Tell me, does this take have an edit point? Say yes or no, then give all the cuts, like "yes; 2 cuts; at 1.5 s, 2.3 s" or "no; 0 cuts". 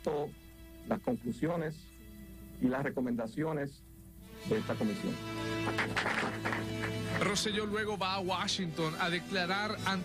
no; 0 cuts